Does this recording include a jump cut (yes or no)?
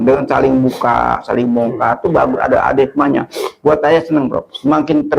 no